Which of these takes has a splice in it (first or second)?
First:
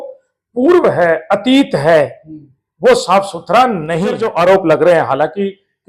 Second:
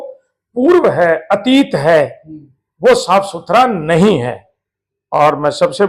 first